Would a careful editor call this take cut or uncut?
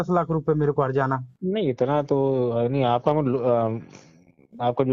cut